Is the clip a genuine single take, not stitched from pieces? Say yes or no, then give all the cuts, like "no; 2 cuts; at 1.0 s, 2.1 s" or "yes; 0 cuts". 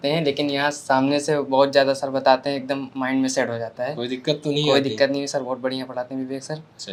yes; 0 cuts